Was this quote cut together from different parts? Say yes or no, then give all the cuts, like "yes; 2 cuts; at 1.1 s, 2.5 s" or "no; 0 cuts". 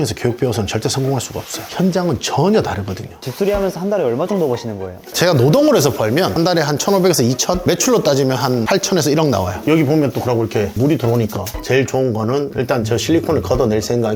yes; 3 cuts; at 3.1 s, 9.5 s, 11.5 s